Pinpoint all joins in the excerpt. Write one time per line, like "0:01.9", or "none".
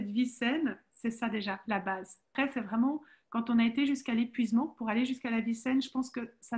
0:02.3